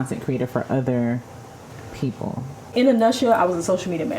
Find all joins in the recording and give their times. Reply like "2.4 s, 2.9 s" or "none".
2.7 s